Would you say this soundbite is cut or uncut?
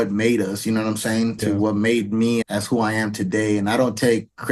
cut